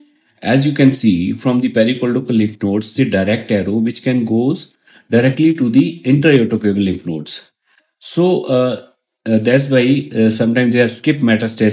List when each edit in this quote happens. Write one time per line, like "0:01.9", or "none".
none